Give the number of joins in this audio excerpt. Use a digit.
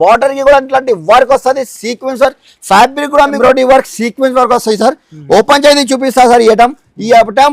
1